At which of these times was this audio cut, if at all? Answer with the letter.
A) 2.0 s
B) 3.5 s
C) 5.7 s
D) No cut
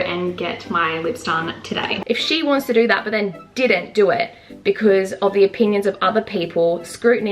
A